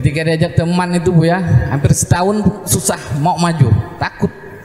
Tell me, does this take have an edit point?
no; 0 cuts

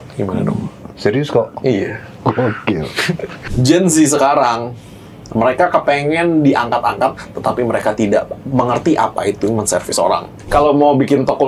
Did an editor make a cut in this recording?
yes; 2 cuts; at 3.5 s, 10.5 s

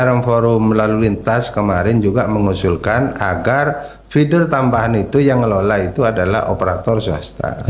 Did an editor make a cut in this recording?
no; 0 cuts

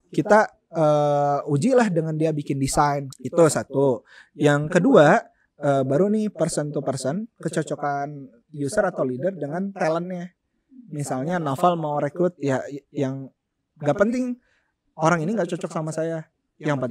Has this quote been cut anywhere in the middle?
yes; 2 cuts; at 3.1 s, 8.4 s

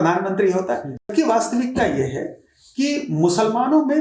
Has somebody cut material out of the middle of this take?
yes; 1 cut; at 1.1 s

